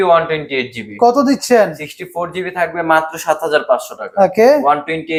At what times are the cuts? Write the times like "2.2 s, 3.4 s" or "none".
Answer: none